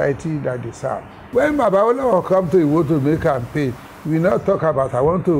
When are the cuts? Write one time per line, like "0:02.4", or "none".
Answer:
0:01.1